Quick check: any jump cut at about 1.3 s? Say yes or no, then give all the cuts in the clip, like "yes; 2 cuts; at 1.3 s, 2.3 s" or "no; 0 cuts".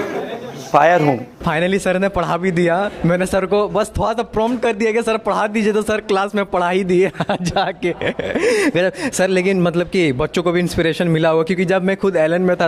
yes; 1 cut; at 1.3 s